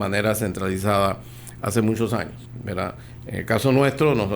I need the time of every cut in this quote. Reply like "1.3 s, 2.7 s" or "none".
2.8 s

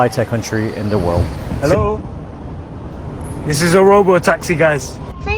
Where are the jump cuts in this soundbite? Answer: 1.4 s

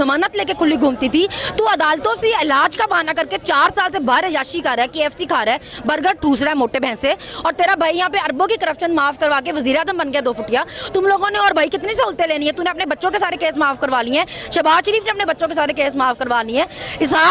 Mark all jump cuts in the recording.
none

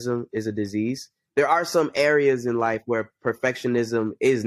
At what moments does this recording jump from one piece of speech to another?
1.2 s

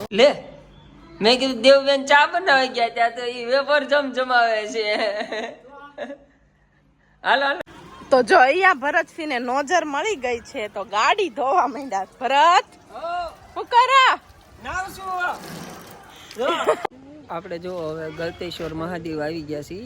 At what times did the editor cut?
7.6 s, 16.8 s

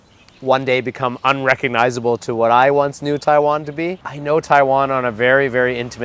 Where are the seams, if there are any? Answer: 4.0 s

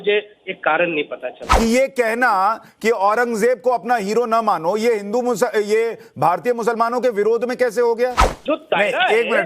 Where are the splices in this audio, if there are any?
1.5 s, 8.3 s

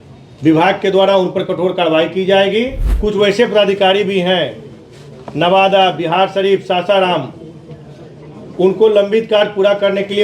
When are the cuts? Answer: 2.8 s

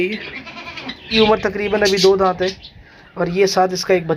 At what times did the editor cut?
1.0 s

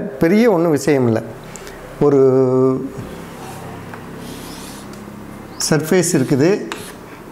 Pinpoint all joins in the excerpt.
none

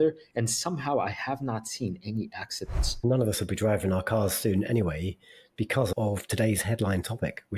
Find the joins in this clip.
3.0 s, 5.9 s

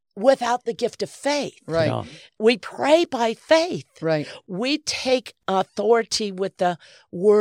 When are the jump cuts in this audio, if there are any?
2.3 s, 5.4 s

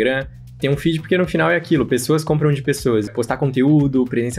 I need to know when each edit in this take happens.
3.1 s

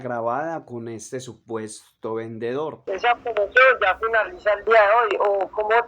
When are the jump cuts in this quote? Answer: 2.8 s

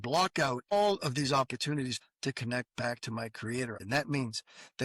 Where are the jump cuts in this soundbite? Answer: 0.7 s, 2.1 s, 3.8 s

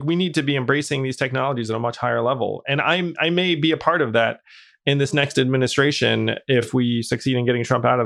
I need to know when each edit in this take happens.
6.7 s

